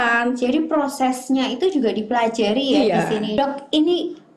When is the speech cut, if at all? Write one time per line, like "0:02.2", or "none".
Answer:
0:03.3